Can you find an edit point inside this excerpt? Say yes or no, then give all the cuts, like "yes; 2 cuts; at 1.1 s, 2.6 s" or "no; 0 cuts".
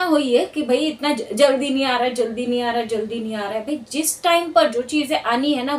no; 0 cuts